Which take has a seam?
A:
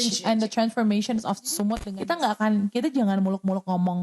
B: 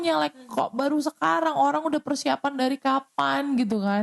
A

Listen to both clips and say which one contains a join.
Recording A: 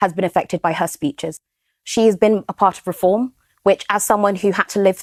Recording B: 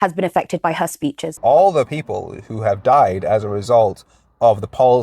B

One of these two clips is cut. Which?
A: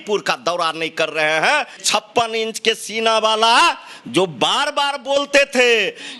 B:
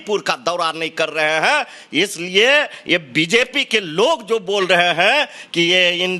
A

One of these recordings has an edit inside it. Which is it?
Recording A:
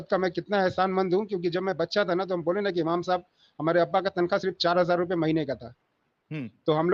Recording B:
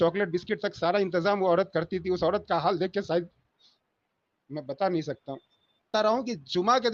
B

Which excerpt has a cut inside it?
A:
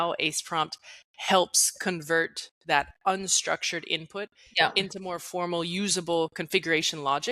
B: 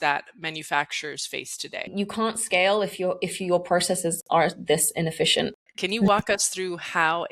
B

